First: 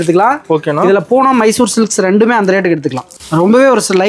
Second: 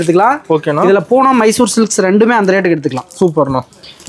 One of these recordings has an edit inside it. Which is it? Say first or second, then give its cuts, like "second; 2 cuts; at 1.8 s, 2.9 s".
first; 1 cut; at 3.0 s